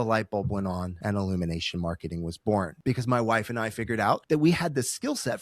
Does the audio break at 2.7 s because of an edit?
yes; 3 cuts; at 0.9 s, 2.7 s, 4.2 s

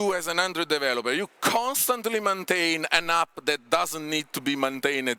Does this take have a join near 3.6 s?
no; 0 cuts

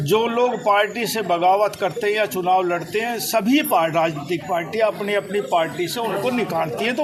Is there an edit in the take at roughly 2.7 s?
no; 0 cuts

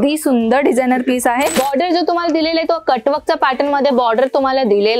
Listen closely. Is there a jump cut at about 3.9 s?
no; 1 cut; at 1.6 s

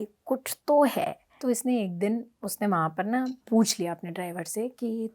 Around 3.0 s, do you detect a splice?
no; 1 cut; at 1.3 s

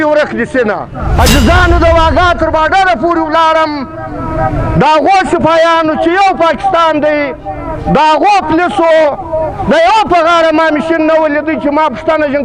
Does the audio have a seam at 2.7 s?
no; 1 cut; at 0.9 s

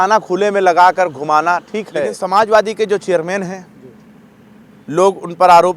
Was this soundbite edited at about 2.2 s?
yes; 1 cut; at 2.2 s

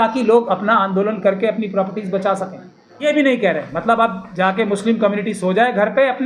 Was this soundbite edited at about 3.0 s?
yes; 1 cut; at 3.0 s

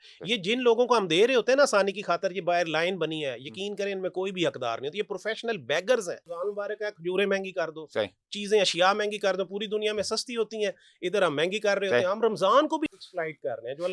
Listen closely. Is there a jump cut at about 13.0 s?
yes; 2 cuts; at 6.3 s, 13.0 s

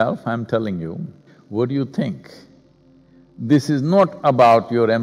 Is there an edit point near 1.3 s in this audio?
yes; 1 cut; at 1.3 s

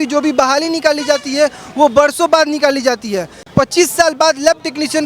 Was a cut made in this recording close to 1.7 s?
no; 1 cut; at 3.5 s

